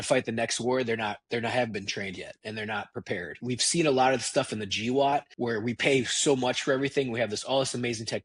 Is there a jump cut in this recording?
yes; 2 cuts; at 3.4 s, 5.3 s

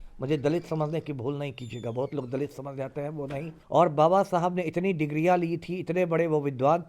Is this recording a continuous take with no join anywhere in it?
no; 1 cut; at 3.5 s

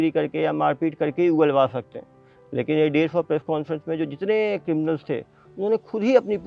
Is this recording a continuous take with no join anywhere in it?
yes; 0 cuts

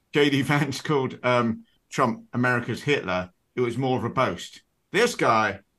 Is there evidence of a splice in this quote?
no; 0 cuts

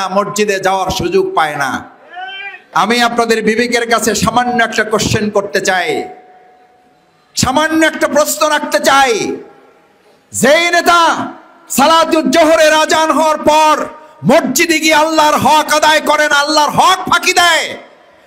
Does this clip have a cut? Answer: yes; 1 cut; at 2.6 s

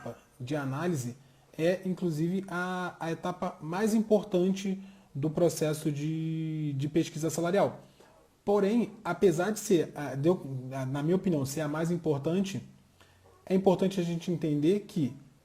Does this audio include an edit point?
no; 0 cuts

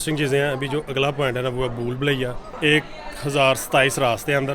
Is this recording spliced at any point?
yes; 1 cut; at 2.5 s

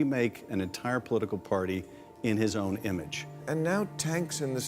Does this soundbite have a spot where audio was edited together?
yes; 1 cut; at 3.4 s

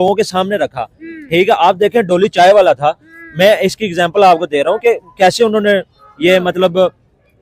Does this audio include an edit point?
no; 0 cuts

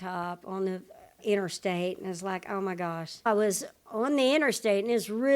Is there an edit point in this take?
yes; 1 cut; at 3.3 s

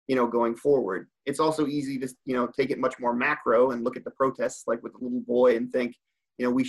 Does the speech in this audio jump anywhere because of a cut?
no; 0 cuts

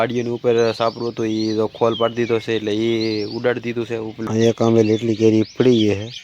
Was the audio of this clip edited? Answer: yes; 1 cut; at 4.1 s

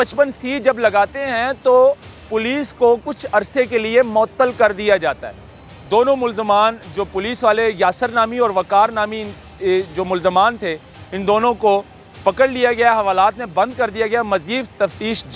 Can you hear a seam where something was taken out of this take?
yes; 1 cut; at 5.7 s

